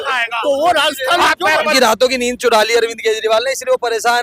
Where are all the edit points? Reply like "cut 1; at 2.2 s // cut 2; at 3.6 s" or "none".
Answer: cut 1; at 1.7 s